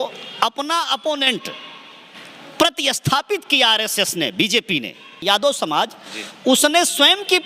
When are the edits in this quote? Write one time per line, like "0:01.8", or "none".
0:05.2